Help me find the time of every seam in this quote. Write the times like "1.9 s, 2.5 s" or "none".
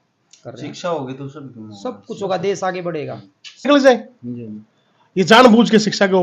3.7 s

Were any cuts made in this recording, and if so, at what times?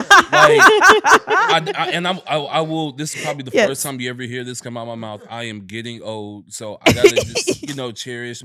none

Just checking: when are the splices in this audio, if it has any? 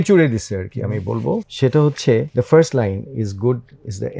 1.5 s, 2.3 s

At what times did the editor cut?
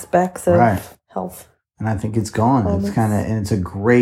1.0 s

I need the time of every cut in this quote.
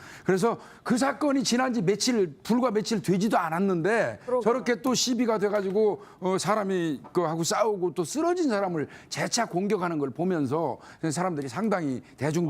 4.8 s

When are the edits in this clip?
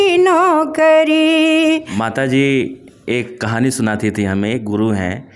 2.0 s

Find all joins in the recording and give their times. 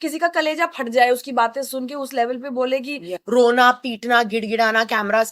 3.1 s

